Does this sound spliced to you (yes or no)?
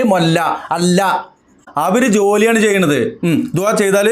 yes